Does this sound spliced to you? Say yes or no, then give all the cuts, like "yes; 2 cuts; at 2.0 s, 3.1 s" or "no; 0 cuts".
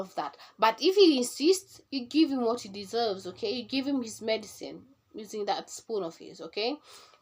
no; 0 cuts